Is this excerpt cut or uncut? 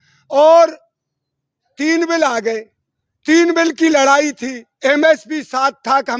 uncut